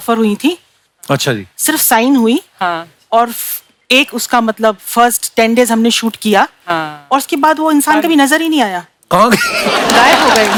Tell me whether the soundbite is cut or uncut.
uncut